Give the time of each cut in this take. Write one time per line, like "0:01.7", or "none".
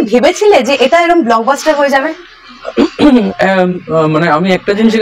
none